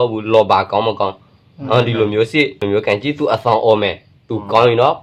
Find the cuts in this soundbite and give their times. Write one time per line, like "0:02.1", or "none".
none